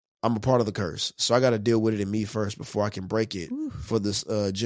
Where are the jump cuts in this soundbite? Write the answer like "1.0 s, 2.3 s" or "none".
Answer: none

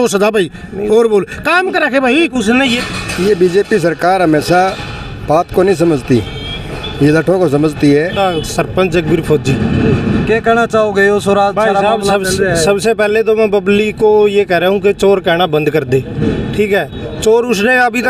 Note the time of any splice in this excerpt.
2.8 s, 8.1 s

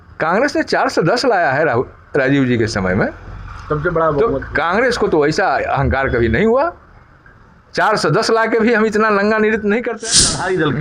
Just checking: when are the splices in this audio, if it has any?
9.9 s

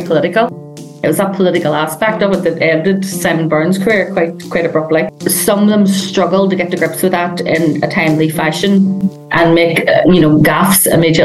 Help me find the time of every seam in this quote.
5.1 s

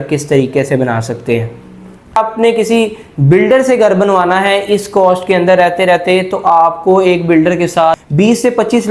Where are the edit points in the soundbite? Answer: 2.2 s, 8.0 s

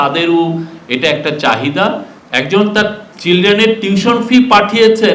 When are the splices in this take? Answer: 2.1 s

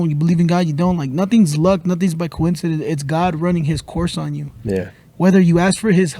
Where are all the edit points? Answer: none

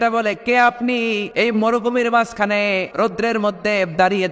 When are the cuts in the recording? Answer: 1.3 s, 2.9 s

